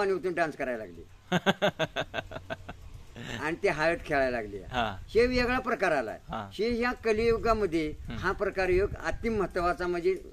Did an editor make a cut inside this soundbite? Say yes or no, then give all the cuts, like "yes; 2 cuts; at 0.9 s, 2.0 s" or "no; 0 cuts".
no; 0 cuts